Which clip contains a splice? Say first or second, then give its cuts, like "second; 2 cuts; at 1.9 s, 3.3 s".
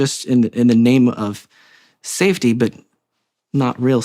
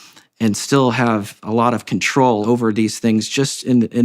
second; 1 cut; at 2.4 s